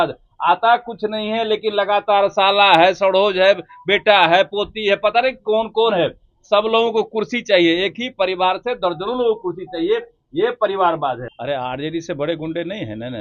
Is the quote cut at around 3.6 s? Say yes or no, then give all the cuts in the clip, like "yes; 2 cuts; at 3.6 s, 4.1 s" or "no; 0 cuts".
no; 1 cut; at 11.3 s